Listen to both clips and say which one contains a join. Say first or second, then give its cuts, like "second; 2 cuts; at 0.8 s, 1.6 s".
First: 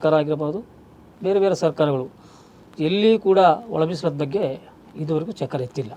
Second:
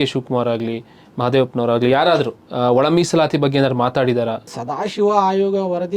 second; 2 cuts; at 2.4 s, 4.5 s